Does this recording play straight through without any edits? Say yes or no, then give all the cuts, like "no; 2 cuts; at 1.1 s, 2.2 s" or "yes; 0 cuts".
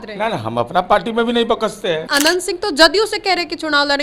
no; 1 cut; at 2.0 s